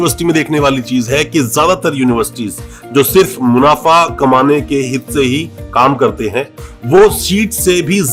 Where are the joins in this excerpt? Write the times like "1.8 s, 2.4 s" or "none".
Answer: none